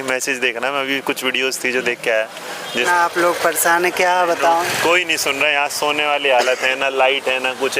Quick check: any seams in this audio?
yes; 2 cuts; at 2.8 s, 4.6 s

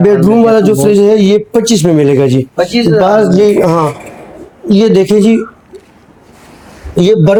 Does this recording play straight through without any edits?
yes; 0 cuts

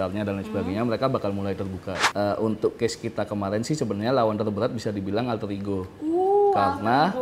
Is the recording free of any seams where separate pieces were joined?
no; 1 cut; at 1.9 s

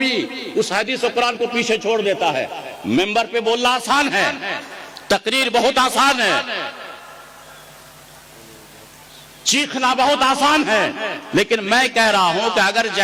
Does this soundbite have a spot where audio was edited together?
no; 0 cuts

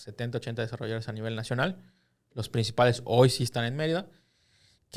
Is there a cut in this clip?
no; 0 cuts

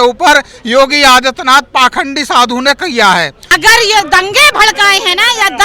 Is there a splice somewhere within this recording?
yes; 1 cut; at 3.4 s

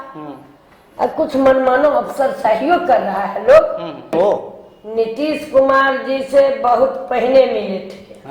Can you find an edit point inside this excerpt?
yes; 1 cut; at 4.1 s

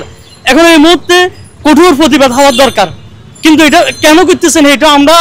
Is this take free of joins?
yes; 0 cuts

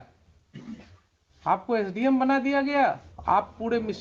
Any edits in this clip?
yes; 1 cut; at 3.1 s

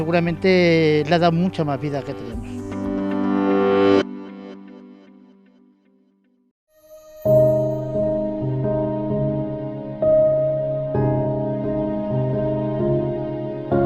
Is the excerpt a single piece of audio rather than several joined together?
yes; 0 cuts

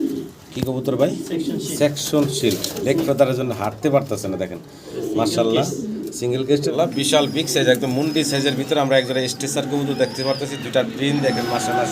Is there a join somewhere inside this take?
yes; 1 cut; at 6.7 s

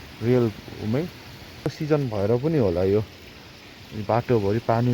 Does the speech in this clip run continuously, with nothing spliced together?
no; 1 cut; at 1.7 s

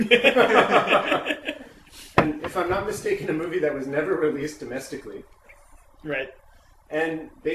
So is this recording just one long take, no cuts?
no; 1 cut; at 3.2 s

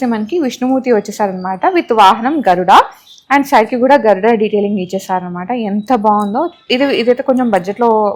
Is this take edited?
no; 0 cuts

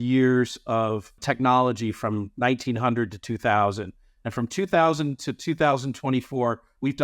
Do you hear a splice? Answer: yes; 1 cut; at 1.2 s

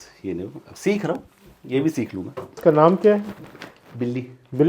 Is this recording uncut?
no; 1 cut; at 2.6 s

